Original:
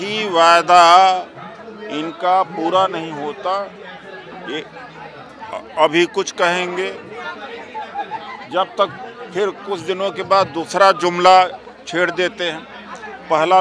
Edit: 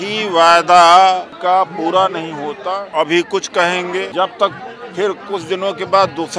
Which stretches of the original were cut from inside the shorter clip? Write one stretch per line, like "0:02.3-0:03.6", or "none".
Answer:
0:01.3-0:02.1
0:03.6-0:05.7
0:06.9-0:08.5